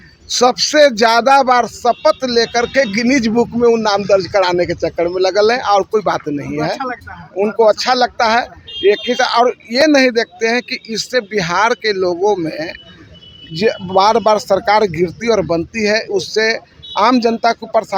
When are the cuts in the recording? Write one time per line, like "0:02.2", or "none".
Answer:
none